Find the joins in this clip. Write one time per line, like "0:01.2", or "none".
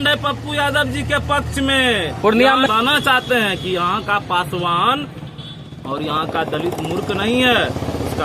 0:02.7